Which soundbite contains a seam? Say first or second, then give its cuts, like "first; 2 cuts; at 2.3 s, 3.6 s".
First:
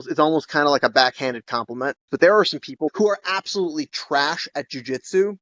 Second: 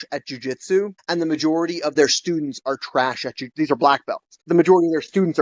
first; 2 cuts; at 2.1 s, 2.9 s